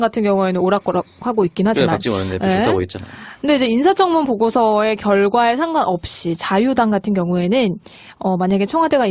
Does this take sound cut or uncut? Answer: cut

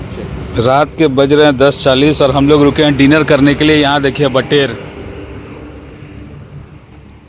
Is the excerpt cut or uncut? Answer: uncut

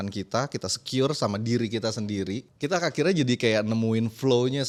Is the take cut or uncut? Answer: uncut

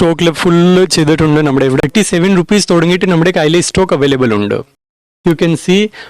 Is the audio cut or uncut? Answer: cut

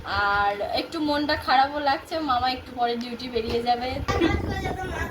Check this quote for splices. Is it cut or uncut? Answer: cut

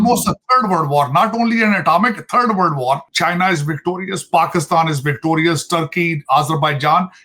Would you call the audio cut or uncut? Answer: cut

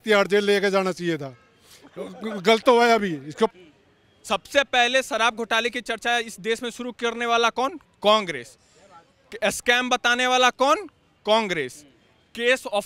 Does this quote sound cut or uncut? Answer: uncut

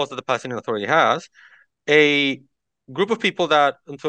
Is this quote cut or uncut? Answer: uncut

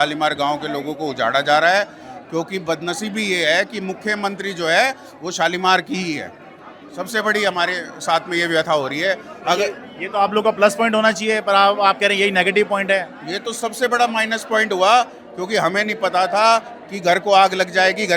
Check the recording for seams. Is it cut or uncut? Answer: uncut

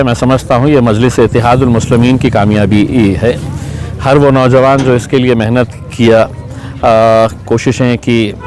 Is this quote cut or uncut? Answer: uncut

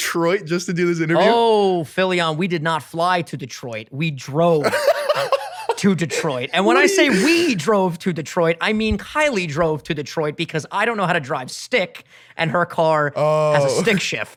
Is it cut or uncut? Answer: uncut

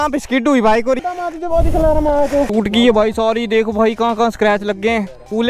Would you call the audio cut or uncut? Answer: cut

